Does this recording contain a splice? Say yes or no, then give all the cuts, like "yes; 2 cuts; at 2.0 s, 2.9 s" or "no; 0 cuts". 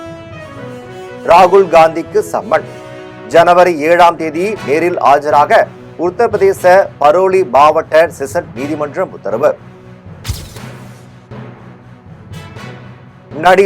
yes; 1 cut; at 1.0 s